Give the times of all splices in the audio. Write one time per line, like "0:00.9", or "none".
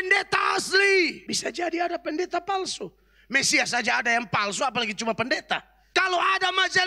0:01.2
0:05.8